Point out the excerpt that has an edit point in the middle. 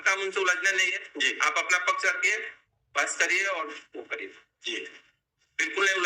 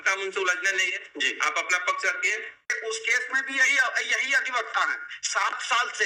second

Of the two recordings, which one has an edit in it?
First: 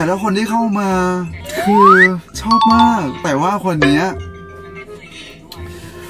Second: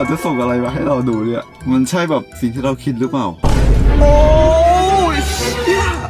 second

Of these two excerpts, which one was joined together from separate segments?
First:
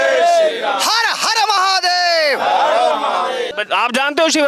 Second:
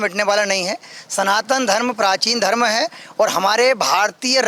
first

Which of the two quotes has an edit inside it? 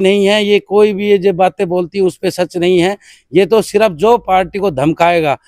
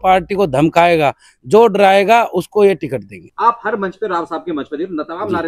second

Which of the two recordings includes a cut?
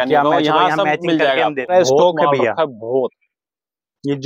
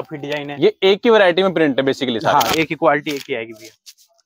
first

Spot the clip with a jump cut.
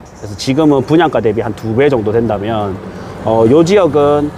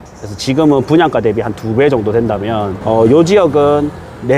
second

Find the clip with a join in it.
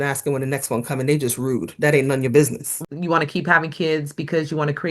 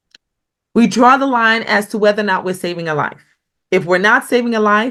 first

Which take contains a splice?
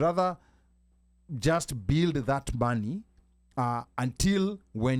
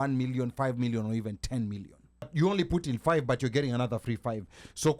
second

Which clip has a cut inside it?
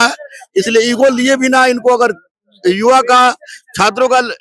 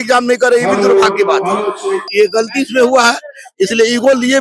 second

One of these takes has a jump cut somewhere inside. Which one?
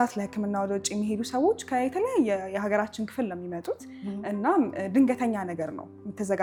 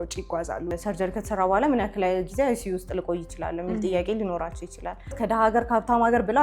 second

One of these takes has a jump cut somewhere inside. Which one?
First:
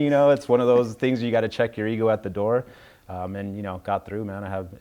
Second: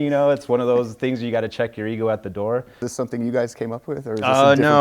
second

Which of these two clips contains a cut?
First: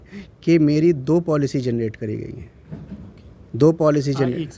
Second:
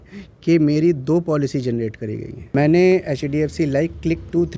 second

